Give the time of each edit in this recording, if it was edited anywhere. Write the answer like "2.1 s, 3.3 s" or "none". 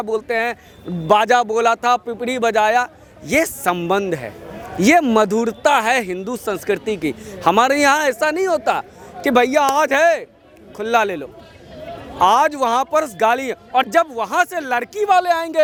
none